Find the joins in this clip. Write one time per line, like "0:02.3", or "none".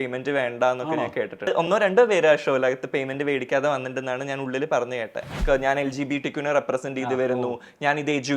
0:01.5
0:05.4